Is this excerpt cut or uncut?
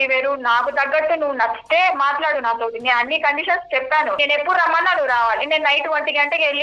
cut